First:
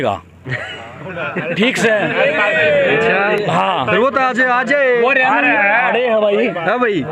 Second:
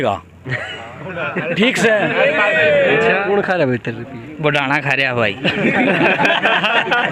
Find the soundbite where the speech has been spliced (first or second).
second